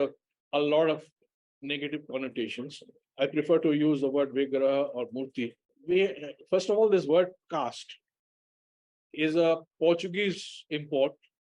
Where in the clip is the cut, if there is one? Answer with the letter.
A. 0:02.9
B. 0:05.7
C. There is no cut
B